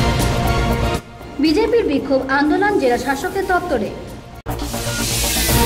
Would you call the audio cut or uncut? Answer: cut